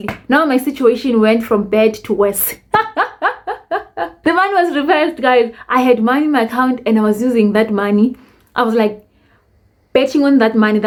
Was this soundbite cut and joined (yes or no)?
no